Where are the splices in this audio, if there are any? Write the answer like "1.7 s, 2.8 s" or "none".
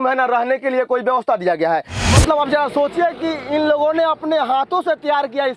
2.0 s